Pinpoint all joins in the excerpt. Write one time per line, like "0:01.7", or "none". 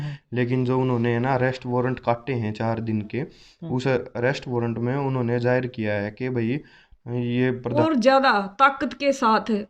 0:07.8